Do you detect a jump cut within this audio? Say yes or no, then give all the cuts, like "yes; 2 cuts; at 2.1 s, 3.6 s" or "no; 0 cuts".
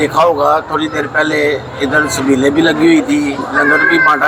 no; 0 cuts